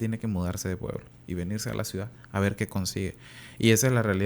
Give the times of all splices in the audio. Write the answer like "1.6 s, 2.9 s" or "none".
none